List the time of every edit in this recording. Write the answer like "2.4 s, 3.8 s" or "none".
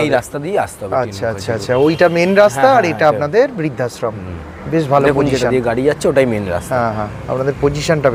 none